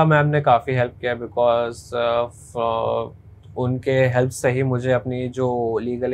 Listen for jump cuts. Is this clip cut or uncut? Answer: uncut